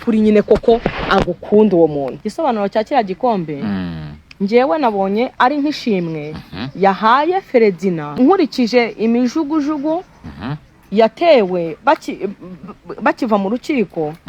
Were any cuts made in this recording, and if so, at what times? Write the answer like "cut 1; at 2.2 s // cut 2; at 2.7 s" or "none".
cut 1; at 2.2 s // cut 2; at 5.3 s // cut 3; at 8.1 s